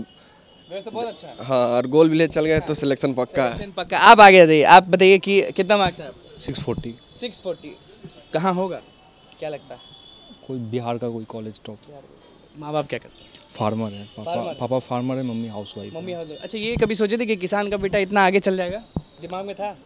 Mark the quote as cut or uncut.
uncut